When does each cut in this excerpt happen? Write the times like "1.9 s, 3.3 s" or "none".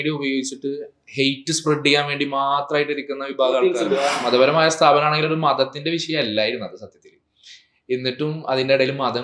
4.2 s